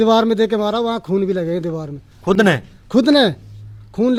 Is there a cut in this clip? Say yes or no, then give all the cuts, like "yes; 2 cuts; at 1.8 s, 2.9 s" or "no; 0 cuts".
no; 0 cuts